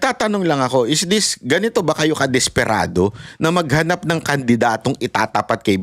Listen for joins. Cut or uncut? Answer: uncut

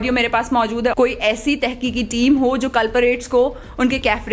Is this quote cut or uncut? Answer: cut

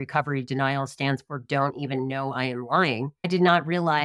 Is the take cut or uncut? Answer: cut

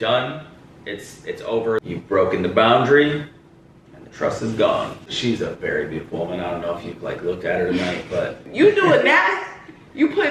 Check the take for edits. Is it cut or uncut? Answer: cut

